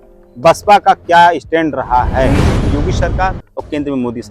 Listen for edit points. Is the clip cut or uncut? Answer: cut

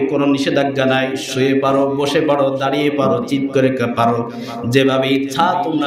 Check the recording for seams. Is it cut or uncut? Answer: uncut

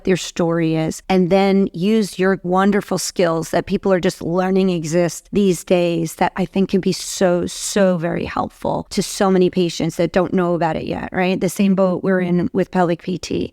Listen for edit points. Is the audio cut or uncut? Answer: cut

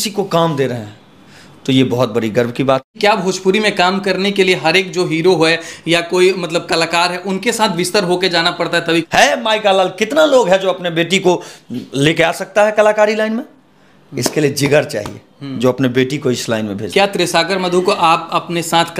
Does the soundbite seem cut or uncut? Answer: cut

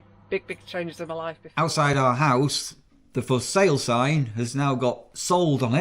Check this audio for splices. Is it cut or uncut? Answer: cut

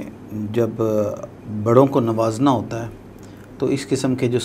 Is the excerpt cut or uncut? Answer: uncut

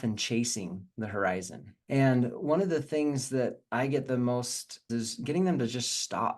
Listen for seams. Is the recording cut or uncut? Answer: cut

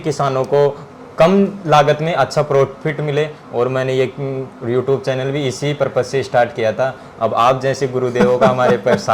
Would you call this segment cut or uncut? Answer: uncut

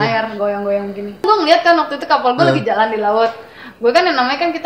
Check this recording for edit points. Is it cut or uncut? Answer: cut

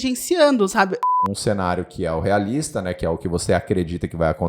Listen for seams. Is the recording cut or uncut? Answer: cut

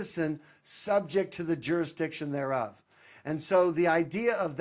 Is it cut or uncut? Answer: uncut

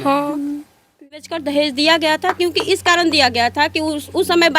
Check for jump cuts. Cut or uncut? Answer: cut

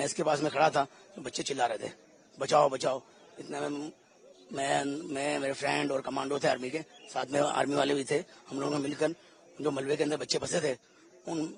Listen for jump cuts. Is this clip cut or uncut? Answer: uncut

